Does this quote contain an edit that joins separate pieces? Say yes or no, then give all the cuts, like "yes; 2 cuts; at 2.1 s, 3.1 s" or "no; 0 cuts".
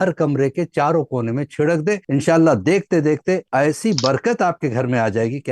yes; 2 cuts; at 2.0 s, 3.5 s